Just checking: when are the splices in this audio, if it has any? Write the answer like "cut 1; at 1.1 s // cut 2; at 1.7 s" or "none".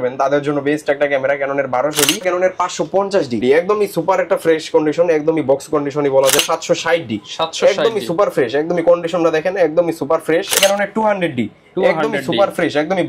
cut 1; at 2.2 s // cut 2; at 3.4 s // cut 3; at 6.4 s // cut 4; at 10.6 s